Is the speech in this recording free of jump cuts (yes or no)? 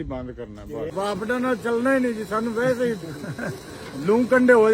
no